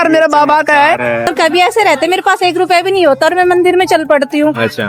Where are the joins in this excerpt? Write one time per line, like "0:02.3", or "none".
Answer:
0:01.3